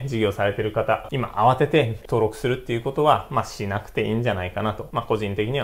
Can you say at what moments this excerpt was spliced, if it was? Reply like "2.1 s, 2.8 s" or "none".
1.1 s, 2.0 s